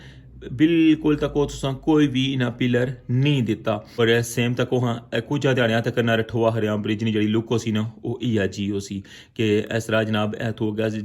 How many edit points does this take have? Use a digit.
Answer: 1